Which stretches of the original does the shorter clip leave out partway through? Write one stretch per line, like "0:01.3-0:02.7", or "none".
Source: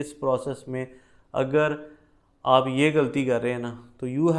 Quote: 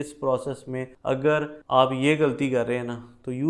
0:01.2-0:01.9